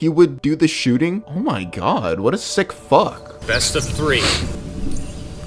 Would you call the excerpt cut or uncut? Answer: uncut